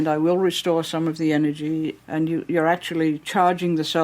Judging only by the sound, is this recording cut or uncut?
cut